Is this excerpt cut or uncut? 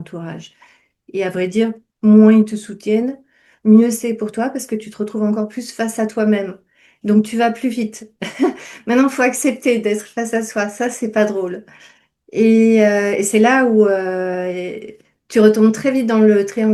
uncut